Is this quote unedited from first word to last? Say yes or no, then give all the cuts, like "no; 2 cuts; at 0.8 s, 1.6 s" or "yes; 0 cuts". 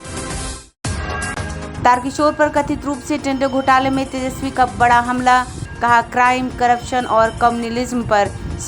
no; 1 cut; at 1.7 s